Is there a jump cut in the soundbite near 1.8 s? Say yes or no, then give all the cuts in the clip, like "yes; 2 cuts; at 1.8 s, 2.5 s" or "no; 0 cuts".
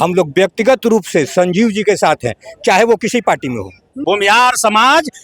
no; 1 cut; at 4.0 s